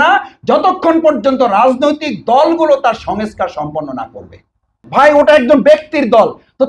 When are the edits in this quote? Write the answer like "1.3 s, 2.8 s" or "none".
4.8 s